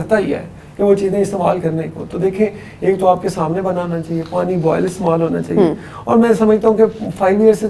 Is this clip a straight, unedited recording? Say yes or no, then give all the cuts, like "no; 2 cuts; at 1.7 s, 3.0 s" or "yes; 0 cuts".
yes; 0 cuts